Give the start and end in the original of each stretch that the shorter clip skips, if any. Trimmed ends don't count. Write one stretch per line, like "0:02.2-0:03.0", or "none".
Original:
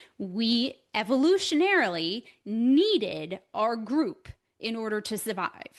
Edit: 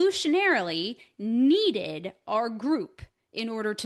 none